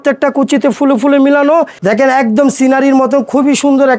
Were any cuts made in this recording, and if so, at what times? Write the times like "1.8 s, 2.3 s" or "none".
1.7 s